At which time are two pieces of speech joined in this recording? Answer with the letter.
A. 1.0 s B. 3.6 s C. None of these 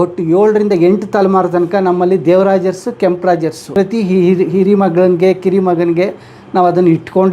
B